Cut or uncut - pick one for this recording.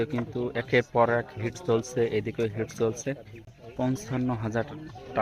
uncut